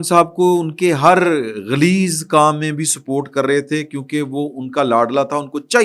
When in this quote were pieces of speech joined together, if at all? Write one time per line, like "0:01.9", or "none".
none